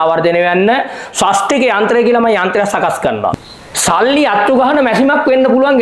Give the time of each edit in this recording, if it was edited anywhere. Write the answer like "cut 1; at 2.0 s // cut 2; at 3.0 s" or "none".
cut 1; at 3.3 s